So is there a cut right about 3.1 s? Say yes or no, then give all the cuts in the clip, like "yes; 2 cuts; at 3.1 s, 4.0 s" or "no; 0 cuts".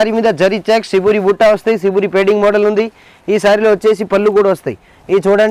no; 0 cuts